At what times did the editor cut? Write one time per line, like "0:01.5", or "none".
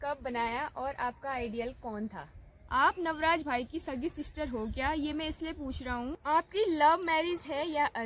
0:02.7
0:06.2